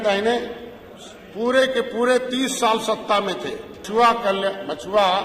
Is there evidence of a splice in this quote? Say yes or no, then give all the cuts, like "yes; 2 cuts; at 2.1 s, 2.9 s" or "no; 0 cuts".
yes; 1 cut; at 3.8 s